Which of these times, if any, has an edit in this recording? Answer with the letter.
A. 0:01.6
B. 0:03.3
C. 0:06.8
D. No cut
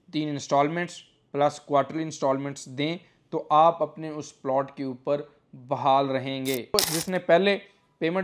C